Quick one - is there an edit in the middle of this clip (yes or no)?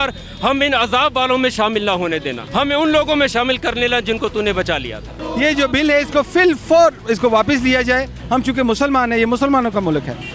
yes